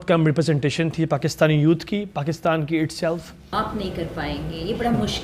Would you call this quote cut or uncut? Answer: cut